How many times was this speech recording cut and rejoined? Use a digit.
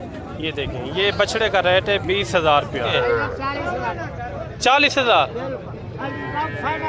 1